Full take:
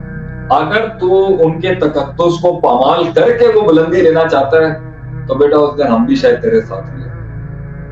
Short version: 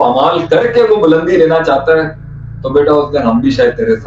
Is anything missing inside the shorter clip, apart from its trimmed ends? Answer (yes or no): no